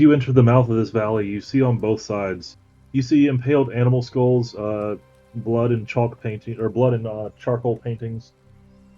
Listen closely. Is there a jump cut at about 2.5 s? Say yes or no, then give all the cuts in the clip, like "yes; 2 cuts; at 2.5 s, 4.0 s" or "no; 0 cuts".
yes; 1 cut; at 2.5 s